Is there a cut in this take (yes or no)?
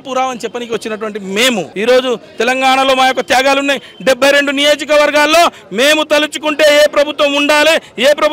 no